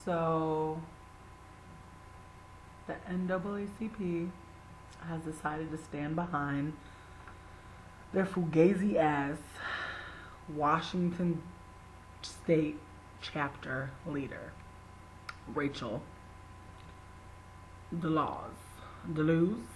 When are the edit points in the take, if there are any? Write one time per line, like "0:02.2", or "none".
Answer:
none